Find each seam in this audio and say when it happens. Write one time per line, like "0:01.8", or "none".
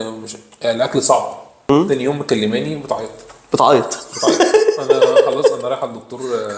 0:01.7